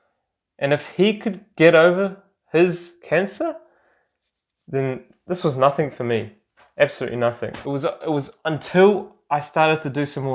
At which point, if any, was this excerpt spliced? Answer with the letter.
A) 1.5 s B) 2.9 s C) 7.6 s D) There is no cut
C